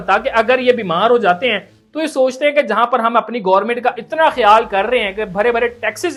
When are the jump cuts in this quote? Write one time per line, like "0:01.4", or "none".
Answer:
none